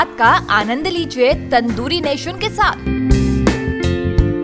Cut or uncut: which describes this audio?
uncut